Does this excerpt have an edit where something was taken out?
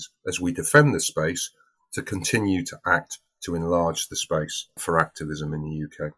yes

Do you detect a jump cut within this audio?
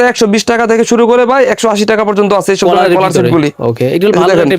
no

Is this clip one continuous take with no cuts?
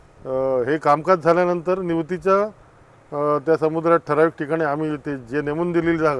yes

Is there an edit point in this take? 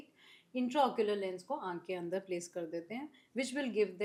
no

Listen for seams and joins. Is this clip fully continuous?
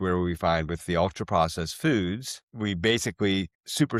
yes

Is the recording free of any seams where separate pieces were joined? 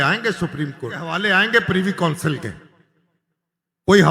no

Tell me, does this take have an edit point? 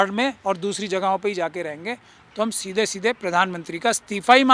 yes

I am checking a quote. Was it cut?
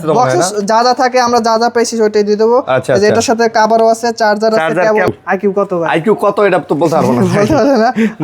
yes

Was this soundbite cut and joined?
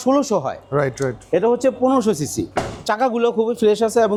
no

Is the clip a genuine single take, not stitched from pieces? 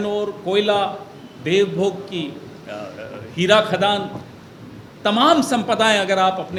yes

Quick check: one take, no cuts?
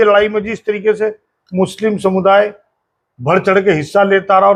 yes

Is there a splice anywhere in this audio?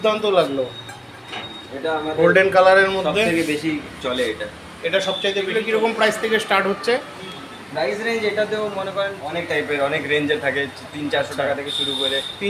yes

